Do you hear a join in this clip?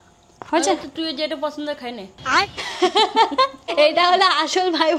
yes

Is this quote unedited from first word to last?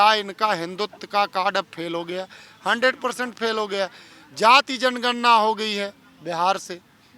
yes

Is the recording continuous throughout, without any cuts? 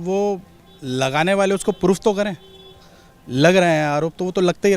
yes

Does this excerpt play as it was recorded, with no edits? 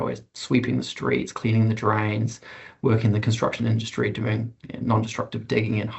yes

